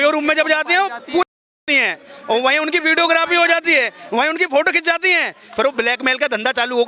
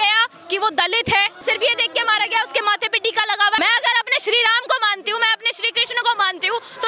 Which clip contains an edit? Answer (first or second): second